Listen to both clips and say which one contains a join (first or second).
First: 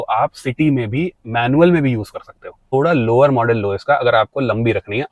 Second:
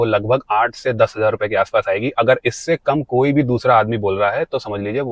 first